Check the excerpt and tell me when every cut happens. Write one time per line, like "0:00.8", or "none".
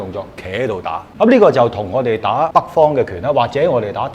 0:01.0
0:02.2